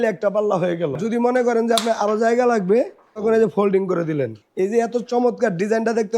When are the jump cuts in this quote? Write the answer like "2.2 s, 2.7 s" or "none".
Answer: 1.0 s, 3.2 s, 4.4 s